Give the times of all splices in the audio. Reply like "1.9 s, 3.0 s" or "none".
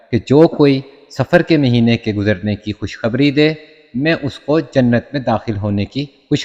none